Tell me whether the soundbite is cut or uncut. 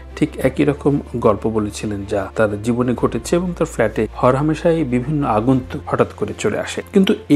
uncut